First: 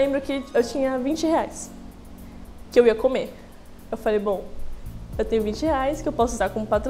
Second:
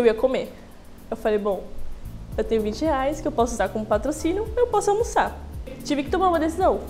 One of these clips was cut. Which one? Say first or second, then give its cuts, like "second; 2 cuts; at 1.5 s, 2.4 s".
second; 1 cut; at 5.8 s